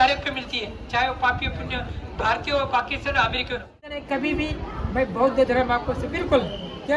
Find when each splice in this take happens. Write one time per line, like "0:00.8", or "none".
0:03.8